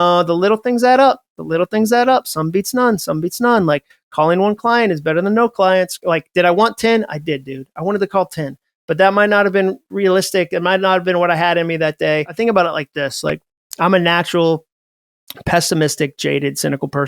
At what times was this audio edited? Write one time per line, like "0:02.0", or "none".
0:12.3